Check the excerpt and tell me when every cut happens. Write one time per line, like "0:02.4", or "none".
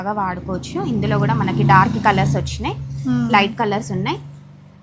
none

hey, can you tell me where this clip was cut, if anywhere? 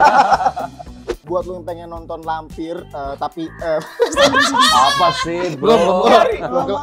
0:01.2

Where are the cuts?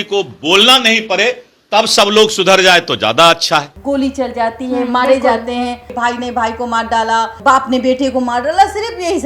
0:03.7
0:05.9

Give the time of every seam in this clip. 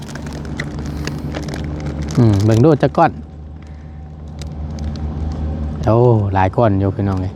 none

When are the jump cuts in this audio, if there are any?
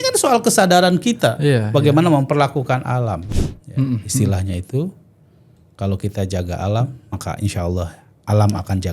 0:03.2

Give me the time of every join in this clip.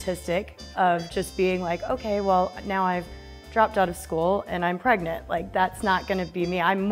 none

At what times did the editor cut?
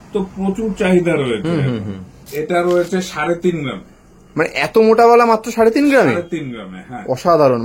0:02.3

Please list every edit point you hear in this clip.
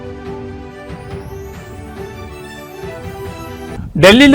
0:02.9

